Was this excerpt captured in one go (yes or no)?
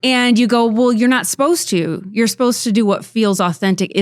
yes